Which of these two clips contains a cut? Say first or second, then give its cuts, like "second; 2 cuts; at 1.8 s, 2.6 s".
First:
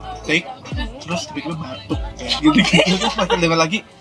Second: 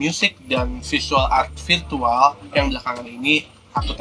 first; 1 cut; at 2.4 s